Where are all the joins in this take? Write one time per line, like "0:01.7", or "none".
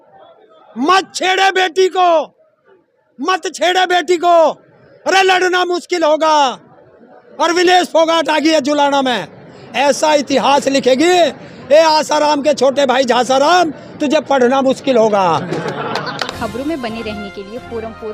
none